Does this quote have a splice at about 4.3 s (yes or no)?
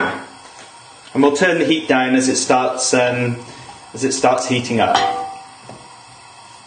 yes